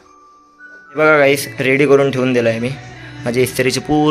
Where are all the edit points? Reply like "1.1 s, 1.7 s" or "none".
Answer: 0.9 s

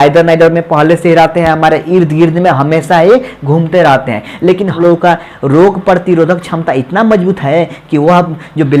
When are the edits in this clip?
4.7 s

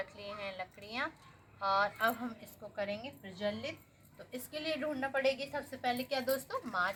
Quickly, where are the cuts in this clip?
none

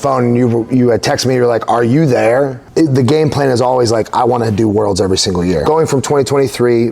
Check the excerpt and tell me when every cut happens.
2.6 s, 5.6 s

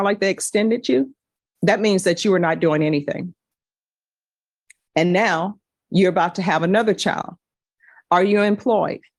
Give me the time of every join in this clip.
none

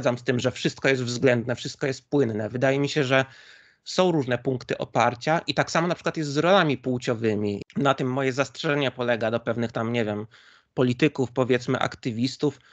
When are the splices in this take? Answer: 7.6 s

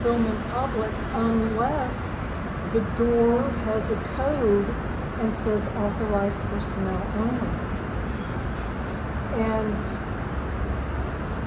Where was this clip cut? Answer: none

